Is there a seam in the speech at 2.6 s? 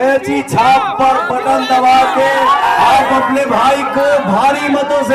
yes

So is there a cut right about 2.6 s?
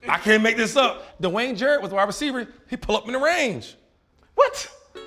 no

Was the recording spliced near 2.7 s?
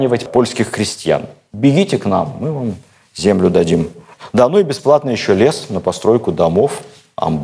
no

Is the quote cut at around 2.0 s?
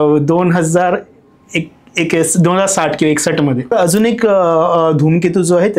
no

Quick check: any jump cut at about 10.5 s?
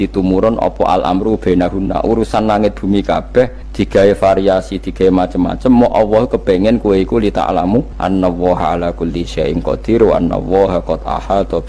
no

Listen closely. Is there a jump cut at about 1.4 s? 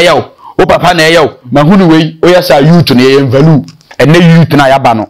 no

